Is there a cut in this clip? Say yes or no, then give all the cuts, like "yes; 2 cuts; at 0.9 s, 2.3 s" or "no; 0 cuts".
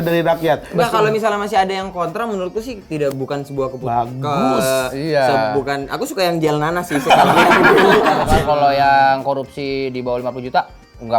yes; 1 cut; at 8.3 s